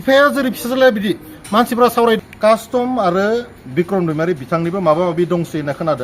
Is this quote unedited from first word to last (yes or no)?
no